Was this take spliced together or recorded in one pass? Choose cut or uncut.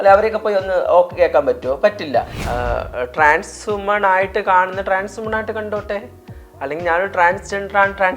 cut